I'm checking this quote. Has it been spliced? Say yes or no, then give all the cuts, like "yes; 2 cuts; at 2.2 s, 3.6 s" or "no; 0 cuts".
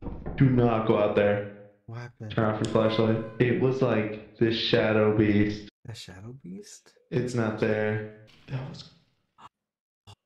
yes; 3 cuts; at 3.3 s, 5.7 s, 8.3 s